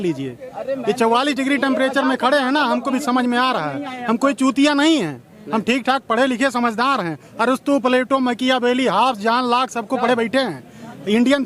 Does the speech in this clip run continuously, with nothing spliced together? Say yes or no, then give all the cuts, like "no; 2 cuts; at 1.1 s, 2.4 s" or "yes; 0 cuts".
yes; 0 cuts